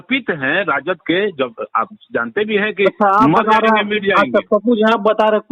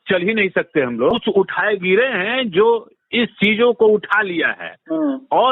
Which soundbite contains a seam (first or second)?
second